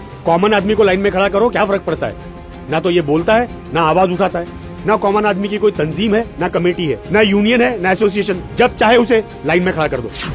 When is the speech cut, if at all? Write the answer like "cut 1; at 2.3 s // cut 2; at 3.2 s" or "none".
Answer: cut 1; at 8.8 s